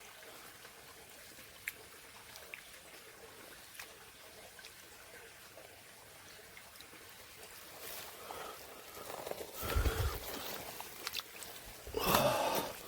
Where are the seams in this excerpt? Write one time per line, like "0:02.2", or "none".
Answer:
none